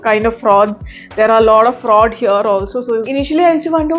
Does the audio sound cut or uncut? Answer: cut